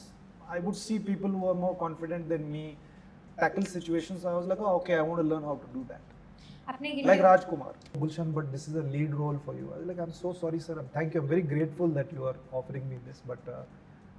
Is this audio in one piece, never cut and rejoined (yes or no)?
no